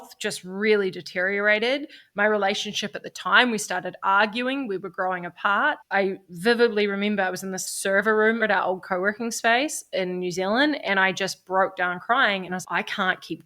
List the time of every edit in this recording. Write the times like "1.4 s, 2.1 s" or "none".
5.8 s, 8.4 s